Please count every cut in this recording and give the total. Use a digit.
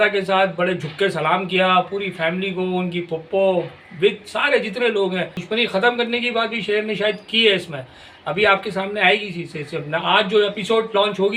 1